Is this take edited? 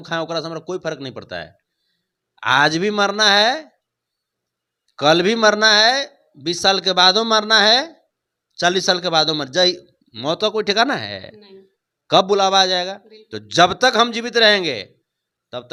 no; 0 cuts

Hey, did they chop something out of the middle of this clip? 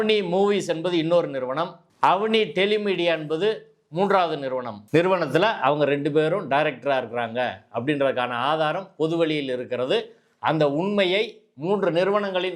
yes; 2 cuts; at 1.8 s, 4.7 s

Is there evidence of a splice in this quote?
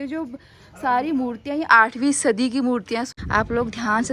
yes; 1 cut; at 3.1 s

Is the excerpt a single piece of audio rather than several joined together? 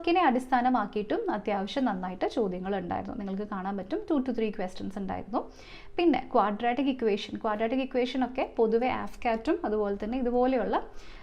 yes; 0 cuts

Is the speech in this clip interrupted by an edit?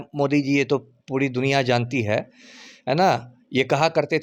no; 0 cuts

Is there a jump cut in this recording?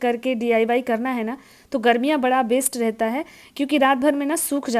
no; 0 cuts

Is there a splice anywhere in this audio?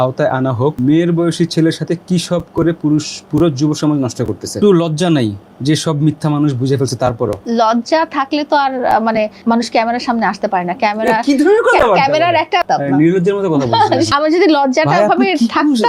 yes; 6 cuts; at 0.8 s, 4.5 s, 7.4 s, 9.4 s, 12.6 s, 14.1 s

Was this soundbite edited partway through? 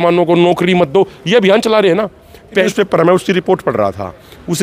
yes; 1 cut; at 2.7 s

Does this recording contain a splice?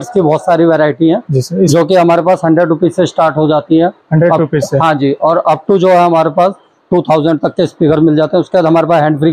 no; 0 cuts

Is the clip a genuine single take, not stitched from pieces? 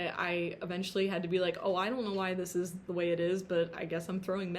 yes; 0 cuts

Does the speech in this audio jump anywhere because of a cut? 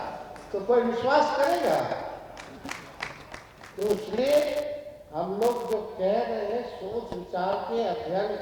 no; 0 cuts

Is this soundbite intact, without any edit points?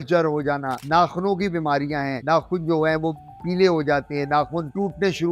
yes; 0 cuts

